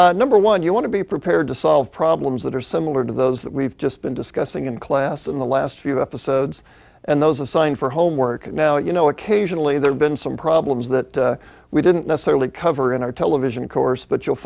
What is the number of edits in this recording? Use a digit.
1